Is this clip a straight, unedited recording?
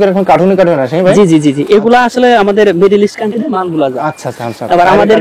yes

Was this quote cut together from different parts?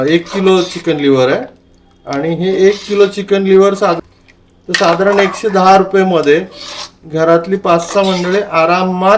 yes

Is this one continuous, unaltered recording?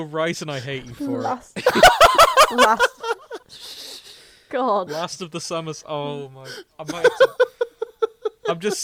yes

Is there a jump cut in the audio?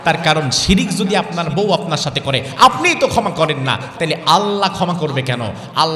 no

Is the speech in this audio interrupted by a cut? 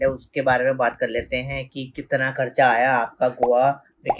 no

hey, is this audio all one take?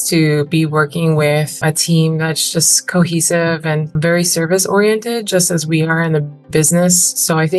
no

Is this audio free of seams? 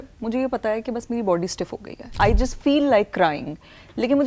no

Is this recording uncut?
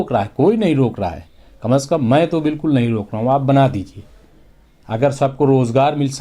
yes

